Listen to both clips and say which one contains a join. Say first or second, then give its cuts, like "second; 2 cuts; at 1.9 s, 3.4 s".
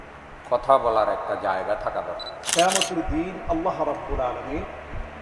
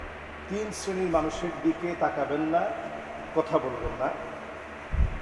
first; 1 cut; at 2.4 s